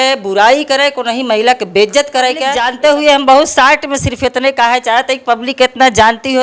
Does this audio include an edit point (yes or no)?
yes